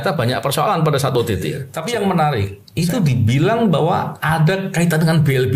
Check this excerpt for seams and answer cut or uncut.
cut